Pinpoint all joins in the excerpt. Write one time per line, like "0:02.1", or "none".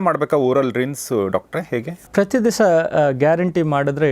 0:02.0